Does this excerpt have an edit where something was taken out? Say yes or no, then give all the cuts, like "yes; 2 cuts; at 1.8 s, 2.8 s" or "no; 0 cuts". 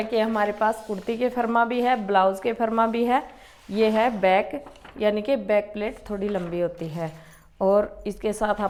no; 0 cuts